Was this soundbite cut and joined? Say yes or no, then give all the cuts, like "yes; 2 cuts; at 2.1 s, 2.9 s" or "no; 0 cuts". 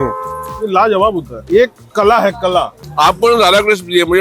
yes; 2 cuts; at 1.3 s, 2.8 s